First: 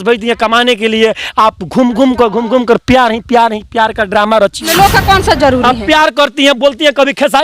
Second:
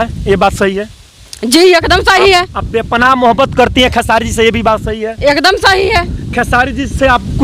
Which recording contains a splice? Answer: first; 1 cut; at 4.7 s

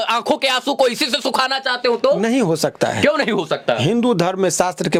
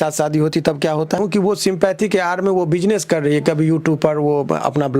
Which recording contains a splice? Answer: second; 1 cut; at 1.2 s

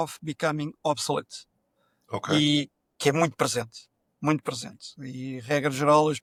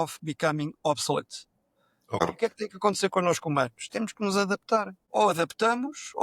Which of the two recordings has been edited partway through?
second; 2 cuts; at 2.2 s, 5.0 s

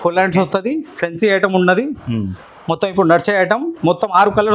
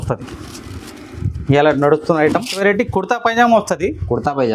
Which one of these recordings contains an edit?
second; 1 cut; at 2.5 s

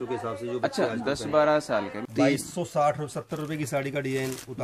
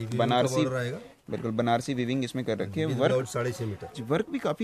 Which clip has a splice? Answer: first; 1 cut; at 2.0 s

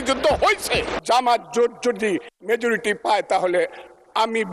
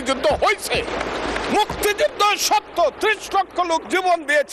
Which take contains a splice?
first; 1 cut; at 0.9 s

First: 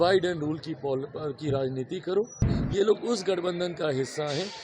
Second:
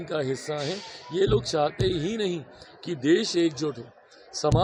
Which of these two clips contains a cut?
first; 1 cut; at 2.5 s

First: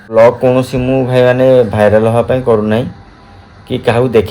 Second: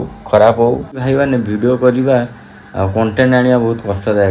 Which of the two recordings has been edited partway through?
second; 1 cut; at 0.9 s

